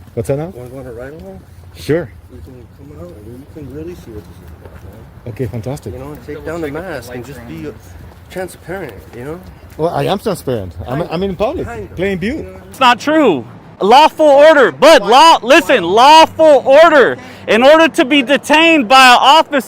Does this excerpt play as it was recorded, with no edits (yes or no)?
no